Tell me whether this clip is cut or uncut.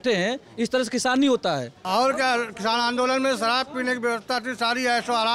cut